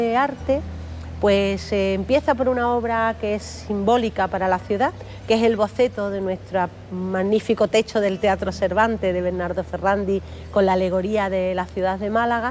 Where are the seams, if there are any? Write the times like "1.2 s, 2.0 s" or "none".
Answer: none